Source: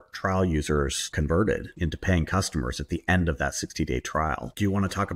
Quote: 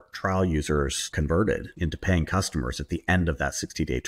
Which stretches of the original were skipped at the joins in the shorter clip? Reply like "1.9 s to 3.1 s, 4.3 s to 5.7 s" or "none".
none